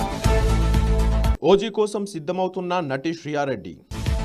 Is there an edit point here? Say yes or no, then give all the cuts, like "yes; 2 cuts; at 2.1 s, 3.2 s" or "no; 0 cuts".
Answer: yes; 1 cut; at 1.3 s